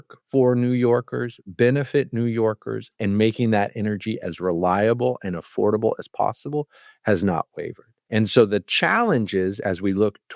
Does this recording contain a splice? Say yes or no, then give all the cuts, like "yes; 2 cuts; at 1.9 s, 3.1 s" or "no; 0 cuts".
no; 0 cuts